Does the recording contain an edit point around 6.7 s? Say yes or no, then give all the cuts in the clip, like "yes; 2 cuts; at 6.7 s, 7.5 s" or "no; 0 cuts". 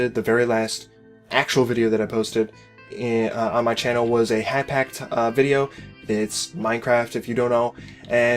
yes; 1 cut; at 6.7 s